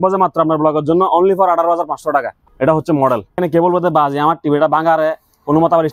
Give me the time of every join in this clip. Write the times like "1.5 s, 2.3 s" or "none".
2.4 s, 3.4 s